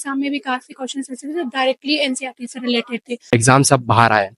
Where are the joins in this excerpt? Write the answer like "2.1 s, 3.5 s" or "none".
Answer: 3.1 s